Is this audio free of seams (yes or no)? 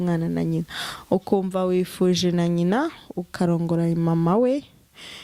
yes